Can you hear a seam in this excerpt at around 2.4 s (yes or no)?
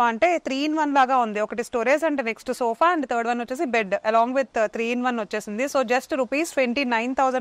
no